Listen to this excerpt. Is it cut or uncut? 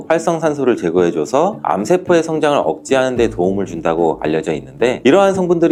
uncut